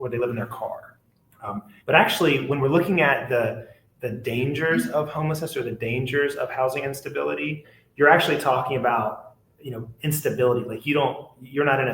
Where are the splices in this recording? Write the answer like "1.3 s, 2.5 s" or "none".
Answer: 7.7 s